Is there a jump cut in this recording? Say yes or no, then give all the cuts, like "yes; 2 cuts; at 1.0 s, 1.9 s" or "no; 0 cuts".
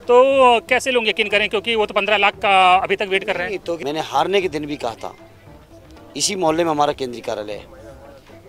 yes; 1 cut; at 3.8 s